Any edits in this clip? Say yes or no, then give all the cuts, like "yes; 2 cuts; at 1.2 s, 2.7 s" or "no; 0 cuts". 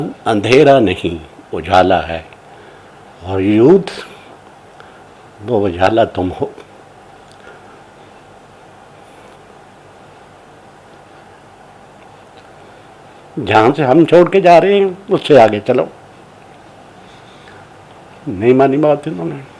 no; 0 cuts